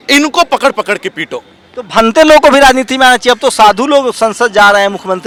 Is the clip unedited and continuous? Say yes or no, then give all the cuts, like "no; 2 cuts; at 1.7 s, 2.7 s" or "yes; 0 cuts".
yes; 0 cuts